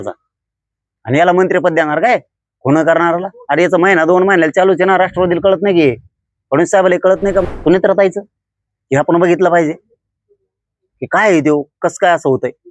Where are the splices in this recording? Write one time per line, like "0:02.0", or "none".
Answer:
0:07.4